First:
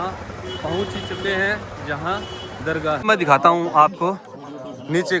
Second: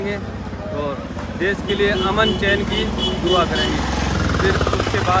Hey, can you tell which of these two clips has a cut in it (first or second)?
first